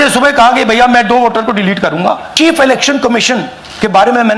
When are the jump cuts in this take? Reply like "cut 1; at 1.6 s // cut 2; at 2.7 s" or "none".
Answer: cut 1; at 2.3 s